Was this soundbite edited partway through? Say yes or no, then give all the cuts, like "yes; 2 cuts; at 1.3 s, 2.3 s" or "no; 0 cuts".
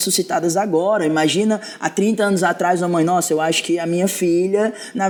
no; 0 cuts